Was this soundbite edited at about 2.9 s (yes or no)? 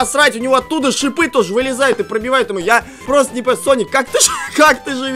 yes